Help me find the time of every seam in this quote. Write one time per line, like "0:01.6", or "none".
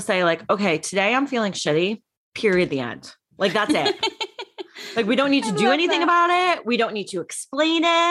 none